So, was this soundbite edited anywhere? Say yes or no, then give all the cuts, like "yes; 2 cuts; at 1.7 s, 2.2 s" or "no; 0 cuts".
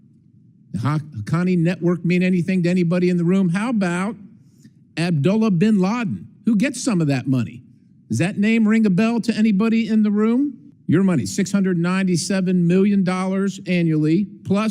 yes; 1 cut; at 10.7 s